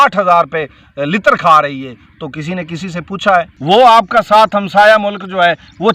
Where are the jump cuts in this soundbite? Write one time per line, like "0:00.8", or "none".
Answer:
0:03.5